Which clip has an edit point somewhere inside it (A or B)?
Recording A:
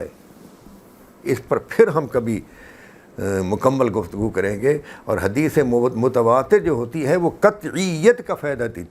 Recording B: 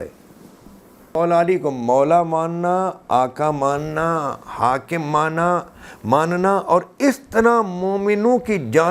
B